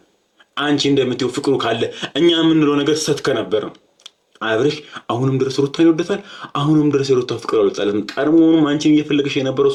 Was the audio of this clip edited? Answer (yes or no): no